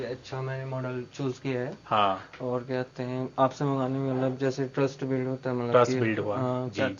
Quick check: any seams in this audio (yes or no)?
no